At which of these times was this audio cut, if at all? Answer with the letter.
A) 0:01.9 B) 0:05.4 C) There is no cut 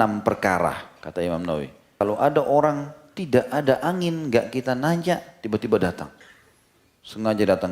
A